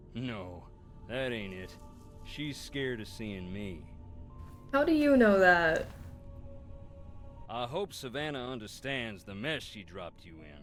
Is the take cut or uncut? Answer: uncut